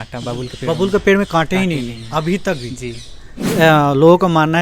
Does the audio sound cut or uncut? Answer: cut